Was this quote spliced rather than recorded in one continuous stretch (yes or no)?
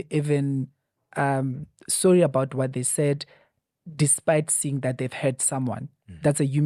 no